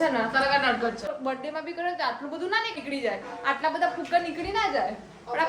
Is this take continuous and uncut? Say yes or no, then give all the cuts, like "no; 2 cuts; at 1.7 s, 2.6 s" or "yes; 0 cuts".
no; 2 cuts; at 1.1 s, 2.8 s